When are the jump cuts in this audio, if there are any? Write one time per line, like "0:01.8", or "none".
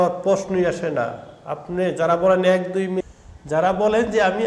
0:03.0